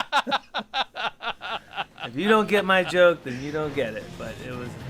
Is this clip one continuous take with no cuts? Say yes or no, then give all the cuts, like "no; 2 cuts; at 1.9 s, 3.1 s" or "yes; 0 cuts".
yes; 0 cuts